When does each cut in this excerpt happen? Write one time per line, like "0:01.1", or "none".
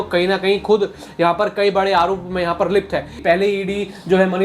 0:03.2